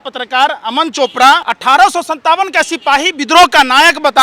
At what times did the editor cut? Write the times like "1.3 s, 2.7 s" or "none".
1.5 s